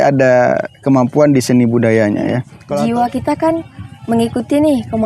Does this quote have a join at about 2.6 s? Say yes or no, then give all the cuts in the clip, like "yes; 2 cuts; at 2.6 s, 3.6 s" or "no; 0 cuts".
yes; 1 cut; at 2.6 s